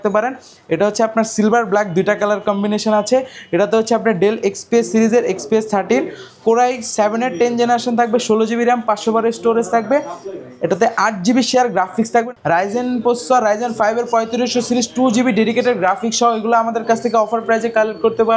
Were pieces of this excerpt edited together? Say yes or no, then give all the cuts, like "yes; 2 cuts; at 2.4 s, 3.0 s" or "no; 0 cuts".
yes; 1 cut; at 12.1 s